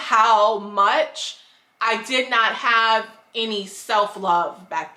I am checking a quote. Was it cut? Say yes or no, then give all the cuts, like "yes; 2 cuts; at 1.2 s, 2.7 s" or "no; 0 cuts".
no; 0 cuts